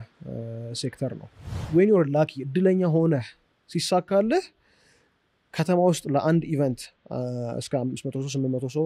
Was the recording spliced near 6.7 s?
no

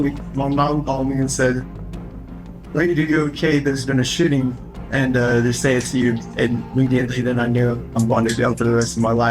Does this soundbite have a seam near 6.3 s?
yes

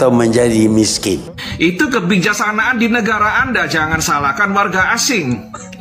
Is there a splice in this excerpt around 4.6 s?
no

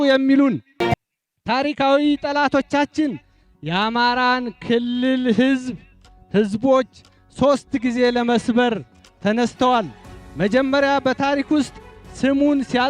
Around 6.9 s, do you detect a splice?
no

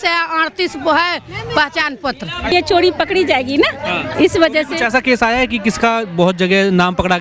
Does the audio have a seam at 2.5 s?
yes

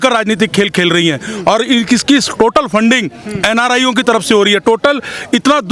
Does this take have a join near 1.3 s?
no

